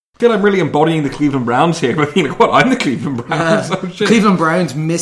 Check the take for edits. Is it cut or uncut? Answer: uncut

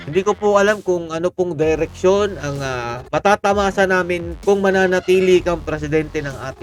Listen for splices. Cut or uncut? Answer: uncut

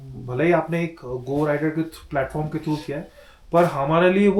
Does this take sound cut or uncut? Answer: uncut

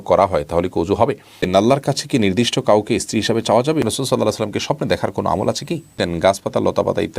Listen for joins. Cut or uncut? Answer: cut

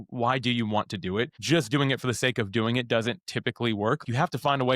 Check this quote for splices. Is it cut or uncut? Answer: cut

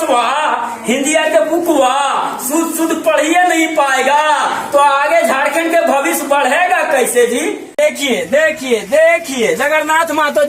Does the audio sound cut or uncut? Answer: cut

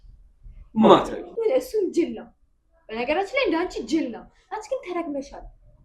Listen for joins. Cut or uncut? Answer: cut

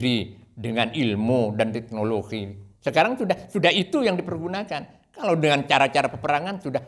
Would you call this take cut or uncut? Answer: uncut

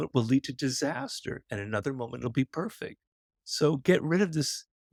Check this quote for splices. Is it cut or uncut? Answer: uncut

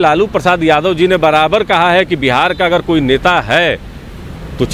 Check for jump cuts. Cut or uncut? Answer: uncut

